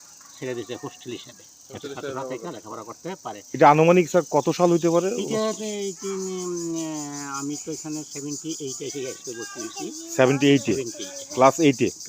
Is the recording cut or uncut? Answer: uncut